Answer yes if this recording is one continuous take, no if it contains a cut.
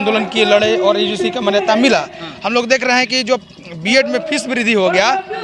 yes